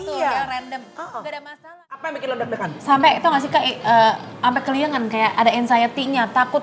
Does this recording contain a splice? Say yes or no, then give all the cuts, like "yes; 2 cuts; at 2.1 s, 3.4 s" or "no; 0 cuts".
yes; 1 cut; at 2.1 s